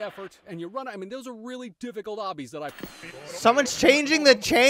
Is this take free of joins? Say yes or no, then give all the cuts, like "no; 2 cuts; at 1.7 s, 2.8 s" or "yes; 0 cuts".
yes; 0 cuts